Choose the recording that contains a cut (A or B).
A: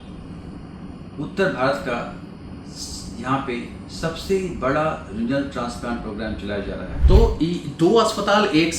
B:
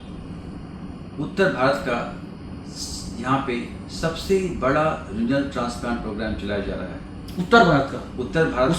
A